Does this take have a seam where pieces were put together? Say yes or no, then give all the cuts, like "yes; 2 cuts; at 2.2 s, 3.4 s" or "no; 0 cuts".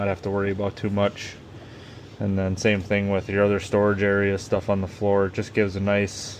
no; 0 cuts